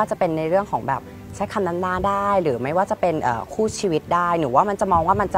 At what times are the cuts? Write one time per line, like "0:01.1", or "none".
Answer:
none